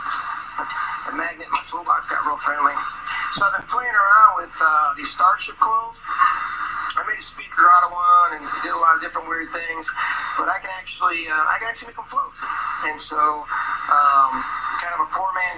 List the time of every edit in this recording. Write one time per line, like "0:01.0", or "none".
0:09.9